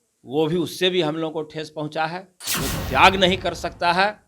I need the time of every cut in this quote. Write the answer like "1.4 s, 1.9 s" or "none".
2.4 s